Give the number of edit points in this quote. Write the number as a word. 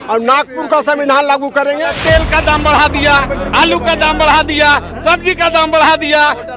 one